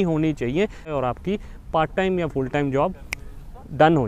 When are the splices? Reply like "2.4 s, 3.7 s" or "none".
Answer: 0.9 s

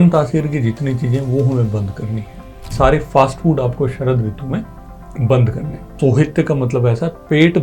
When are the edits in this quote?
2.7 s, 5.9 s

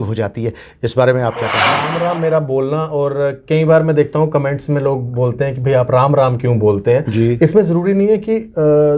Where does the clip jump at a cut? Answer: 1.9 s

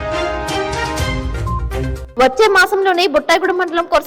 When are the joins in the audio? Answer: 2.0 s

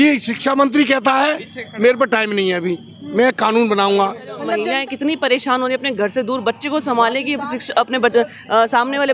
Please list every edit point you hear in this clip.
4.5 s

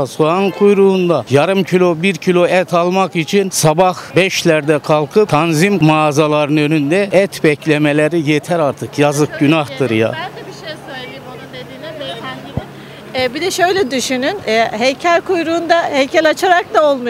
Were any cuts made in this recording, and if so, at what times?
none

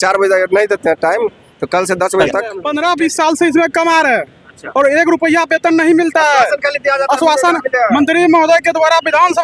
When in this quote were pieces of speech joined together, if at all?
2.6 s

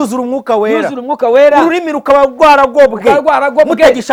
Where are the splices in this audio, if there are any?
none

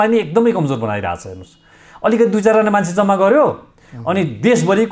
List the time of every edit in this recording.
none

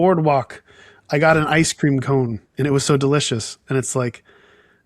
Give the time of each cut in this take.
none

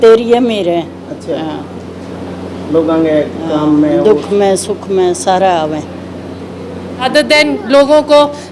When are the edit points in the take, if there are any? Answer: 7.0 s

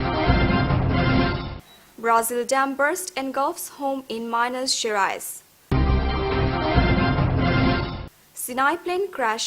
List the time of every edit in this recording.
none

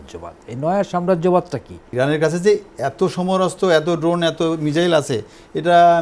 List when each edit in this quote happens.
1.8 s

